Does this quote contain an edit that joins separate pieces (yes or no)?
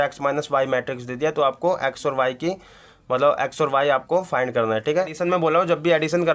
yes